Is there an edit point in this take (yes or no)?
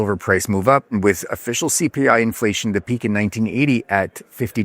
yes